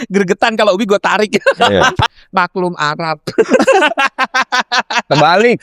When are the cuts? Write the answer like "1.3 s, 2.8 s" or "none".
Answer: 2.1 s